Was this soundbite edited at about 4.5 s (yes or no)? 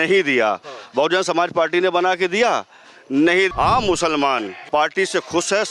yes